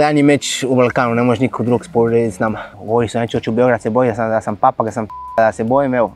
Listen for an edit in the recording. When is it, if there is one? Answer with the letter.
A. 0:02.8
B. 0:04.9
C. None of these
A